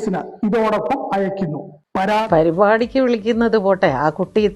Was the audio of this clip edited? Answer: yes; 1 cut; at 2.2 s

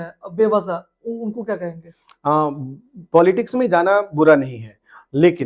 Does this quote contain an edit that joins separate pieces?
no; 0 cuts

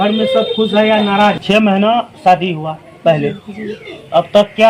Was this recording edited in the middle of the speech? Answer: yes; 1 cut; at 1.4 s

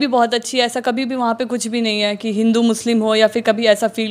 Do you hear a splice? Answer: no; 0 cuts

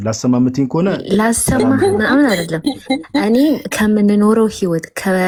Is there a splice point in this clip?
no; 0 cuts

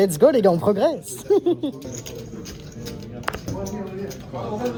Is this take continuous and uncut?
yes; 0 cuts

